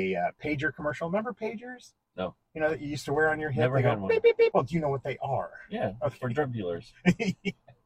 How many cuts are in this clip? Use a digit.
1